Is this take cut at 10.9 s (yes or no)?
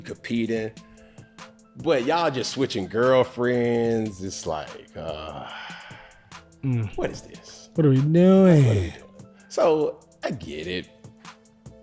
yes